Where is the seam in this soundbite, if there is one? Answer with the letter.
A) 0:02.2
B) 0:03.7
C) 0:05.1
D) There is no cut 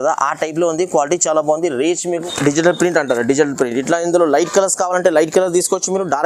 A